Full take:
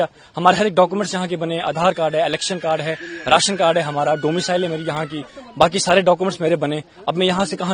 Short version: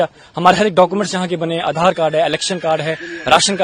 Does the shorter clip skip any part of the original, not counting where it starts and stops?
no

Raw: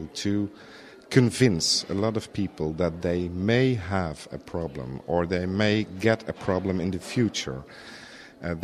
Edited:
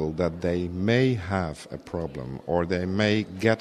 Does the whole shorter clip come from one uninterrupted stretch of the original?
yes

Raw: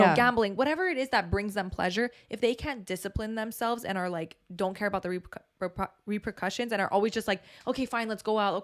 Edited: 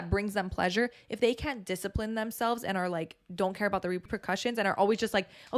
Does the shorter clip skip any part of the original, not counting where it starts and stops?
yes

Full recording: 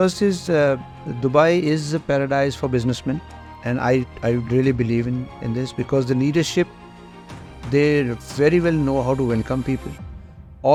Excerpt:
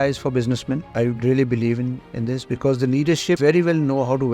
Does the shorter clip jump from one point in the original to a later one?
yes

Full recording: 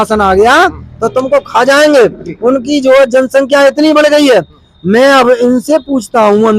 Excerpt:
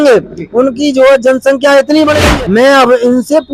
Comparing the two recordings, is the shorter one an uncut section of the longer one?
no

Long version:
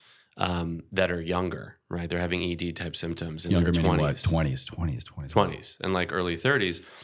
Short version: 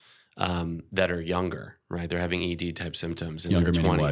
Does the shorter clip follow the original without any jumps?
yes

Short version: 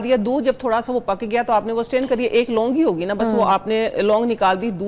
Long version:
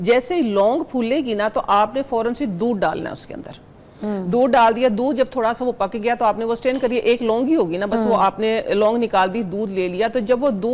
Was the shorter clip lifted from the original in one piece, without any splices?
yes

